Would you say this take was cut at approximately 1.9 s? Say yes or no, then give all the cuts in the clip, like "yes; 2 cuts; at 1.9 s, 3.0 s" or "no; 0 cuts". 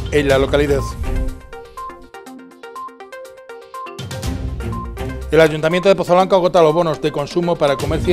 no; 1 cut; at 5.3 s